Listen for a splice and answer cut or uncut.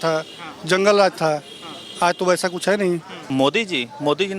cut